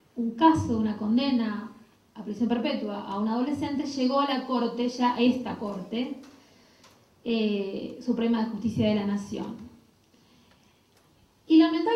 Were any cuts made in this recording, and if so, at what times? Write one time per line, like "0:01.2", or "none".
0:06.5